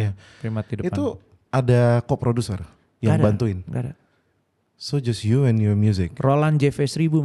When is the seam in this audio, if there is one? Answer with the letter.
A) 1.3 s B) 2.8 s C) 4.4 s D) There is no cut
A